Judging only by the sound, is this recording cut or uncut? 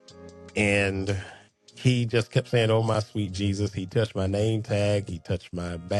uncut